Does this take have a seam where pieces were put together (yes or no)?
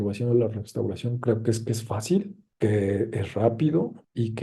no